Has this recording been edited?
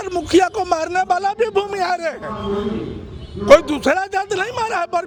no; 0 cuts

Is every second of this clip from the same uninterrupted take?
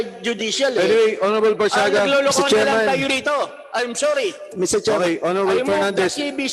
yes; 0 cuts

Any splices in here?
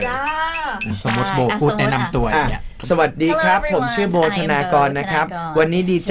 yes; 1 cut; at 1.0 s

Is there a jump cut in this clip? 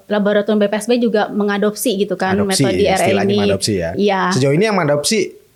no; 0 cuts

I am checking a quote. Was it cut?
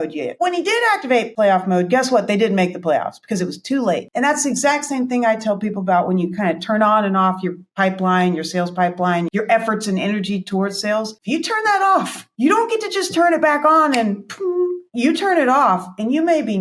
no; 0 cuts

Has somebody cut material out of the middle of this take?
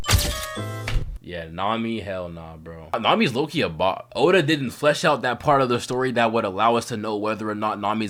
no; 0 cuts

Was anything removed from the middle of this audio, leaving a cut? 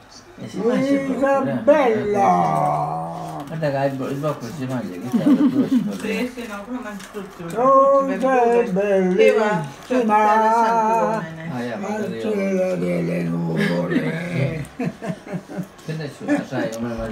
no; 0 cuts

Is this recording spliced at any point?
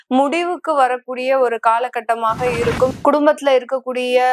yes; 1 cut; at 3.0 s

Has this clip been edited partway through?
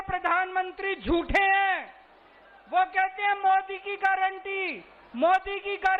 no; 0 cuts

